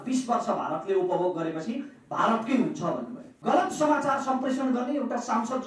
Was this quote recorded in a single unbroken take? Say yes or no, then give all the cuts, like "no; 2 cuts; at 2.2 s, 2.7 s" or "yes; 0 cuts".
no; 1 cut; at 3.4 s